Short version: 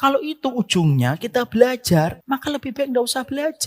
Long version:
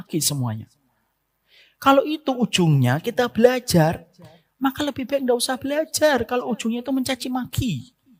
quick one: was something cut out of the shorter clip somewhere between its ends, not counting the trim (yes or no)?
yes